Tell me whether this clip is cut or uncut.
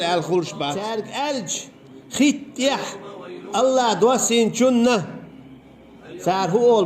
cut